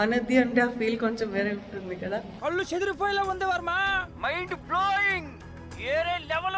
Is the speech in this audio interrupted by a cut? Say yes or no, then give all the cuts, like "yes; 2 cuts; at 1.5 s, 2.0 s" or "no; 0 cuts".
no; 0 cuts